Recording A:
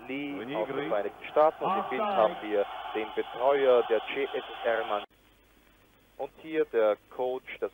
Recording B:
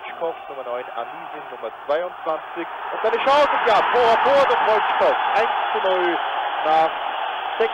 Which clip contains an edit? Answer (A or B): A